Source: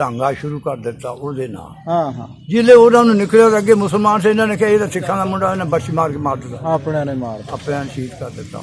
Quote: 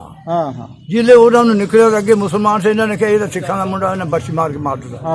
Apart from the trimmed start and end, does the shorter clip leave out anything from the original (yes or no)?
no